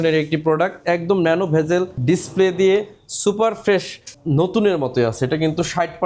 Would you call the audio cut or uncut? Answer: cut